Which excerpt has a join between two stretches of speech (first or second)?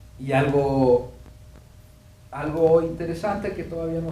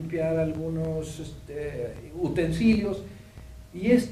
first